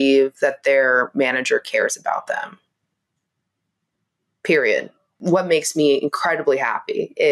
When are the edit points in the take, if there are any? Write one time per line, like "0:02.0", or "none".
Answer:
0:05.1

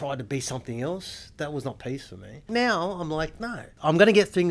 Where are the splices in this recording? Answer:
0:02.5
0:03.7

